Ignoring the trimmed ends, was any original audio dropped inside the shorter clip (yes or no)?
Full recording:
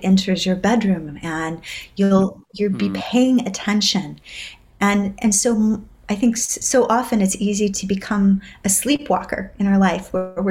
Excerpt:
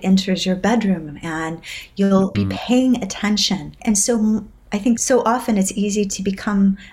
yes